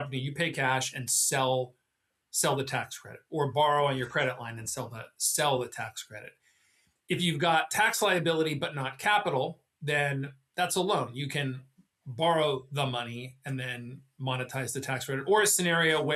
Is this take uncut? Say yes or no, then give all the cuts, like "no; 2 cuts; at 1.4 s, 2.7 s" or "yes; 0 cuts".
yes; 0 cuts